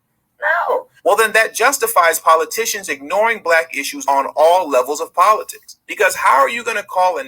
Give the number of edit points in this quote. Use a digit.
1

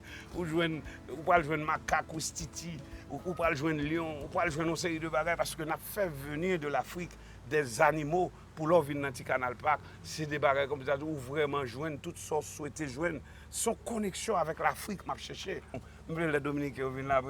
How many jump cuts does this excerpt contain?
1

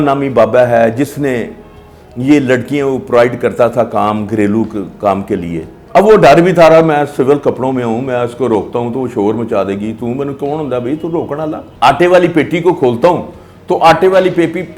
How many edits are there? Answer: 2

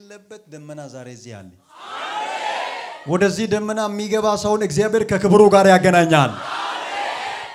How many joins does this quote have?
0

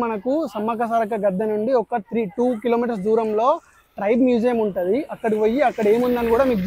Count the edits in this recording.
0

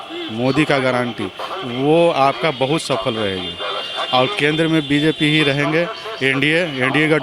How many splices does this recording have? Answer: 0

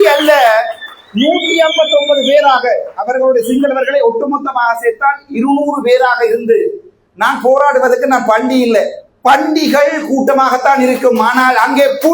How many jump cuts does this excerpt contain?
0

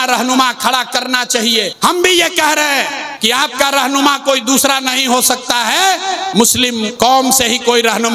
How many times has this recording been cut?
3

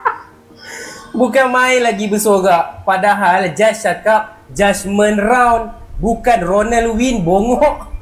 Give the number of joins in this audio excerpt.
0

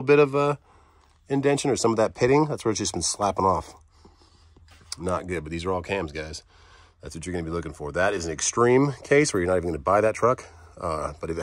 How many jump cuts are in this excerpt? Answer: 0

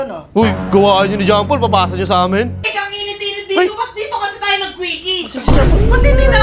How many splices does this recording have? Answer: 1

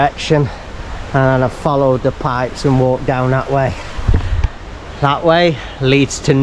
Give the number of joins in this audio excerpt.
0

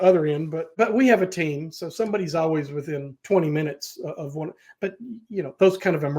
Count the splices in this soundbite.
2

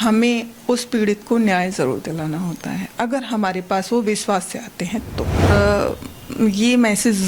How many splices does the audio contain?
1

